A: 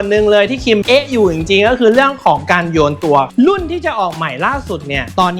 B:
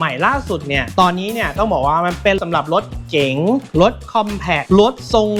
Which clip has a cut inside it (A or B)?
A